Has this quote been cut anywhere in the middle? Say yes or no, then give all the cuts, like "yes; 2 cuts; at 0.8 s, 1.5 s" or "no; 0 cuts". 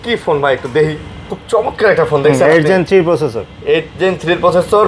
yes; 1 cut; at 1.3 s